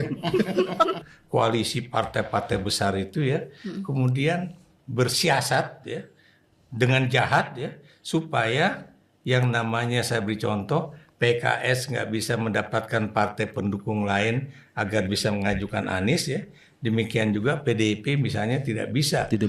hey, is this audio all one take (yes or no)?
no